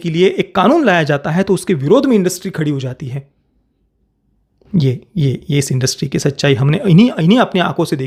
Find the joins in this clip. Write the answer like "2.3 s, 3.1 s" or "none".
none